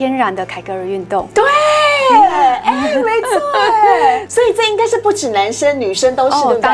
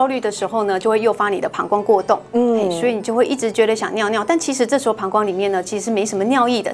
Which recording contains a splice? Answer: first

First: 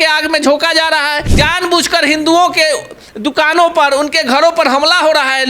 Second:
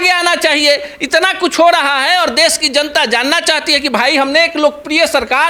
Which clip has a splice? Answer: first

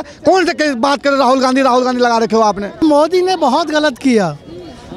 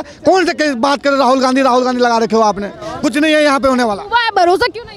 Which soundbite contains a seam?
first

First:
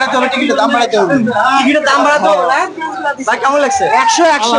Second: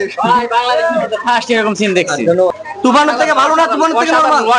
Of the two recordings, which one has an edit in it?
second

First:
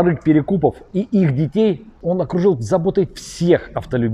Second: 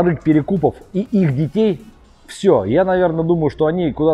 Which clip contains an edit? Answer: first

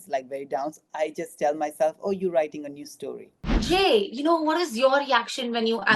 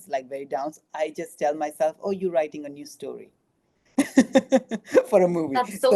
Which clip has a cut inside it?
first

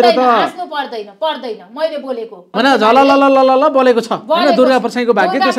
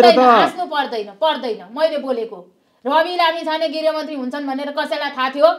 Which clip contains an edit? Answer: first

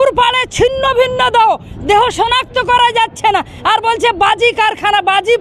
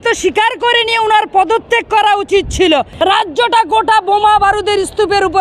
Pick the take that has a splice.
second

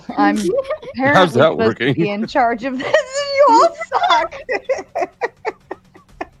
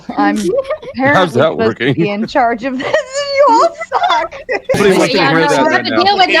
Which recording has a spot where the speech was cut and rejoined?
second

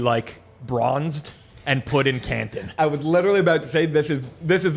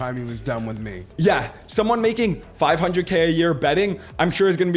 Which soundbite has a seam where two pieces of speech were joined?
second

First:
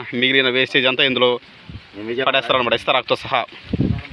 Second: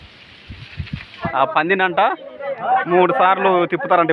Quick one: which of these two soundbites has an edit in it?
second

